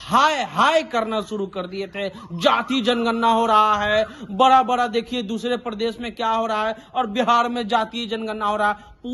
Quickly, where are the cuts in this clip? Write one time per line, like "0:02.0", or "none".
none